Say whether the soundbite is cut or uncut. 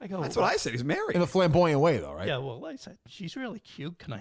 uncut